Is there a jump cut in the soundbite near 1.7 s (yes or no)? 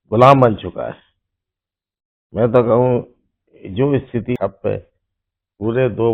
no